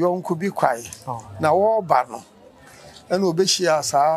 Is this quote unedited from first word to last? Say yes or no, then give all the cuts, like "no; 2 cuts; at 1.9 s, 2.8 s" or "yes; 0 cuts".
yes; 0 cuts